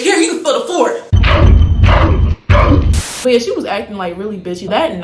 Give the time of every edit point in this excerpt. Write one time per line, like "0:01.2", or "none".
0:03.1